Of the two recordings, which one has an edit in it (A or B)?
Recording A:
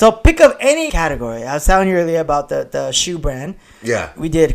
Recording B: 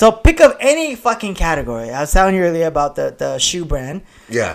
A